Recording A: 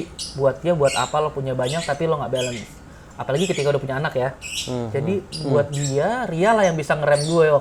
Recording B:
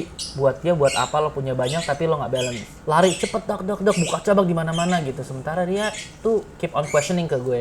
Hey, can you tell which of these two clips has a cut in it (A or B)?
B